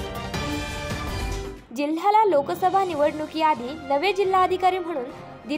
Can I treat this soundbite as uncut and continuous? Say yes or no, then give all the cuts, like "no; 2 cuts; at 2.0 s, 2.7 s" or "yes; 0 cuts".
no; 1 cut; at 1.6 s